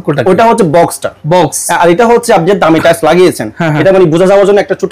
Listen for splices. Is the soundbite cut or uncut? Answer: uncut